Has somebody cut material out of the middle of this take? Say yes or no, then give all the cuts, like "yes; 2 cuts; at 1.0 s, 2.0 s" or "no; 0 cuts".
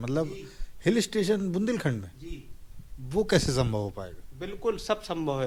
no; 0 cuts